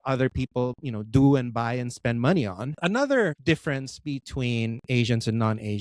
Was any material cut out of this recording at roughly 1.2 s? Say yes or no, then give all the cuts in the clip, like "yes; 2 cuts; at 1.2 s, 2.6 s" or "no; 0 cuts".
no; 2 cuts; at 2.7 s, 3.4 s